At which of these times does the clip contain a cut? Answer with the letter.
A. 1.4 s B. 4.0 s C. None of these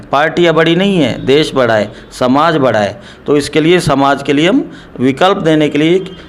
C